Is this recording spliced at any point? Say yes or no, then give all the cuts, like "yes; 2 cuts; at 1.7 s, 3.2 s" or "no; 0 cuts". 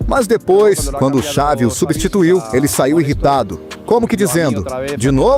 no; 0 cuts